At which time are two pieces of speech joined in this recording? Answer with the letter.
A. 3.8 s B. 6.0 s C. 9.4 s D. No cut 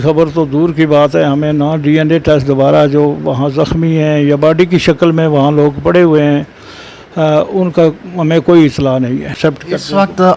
C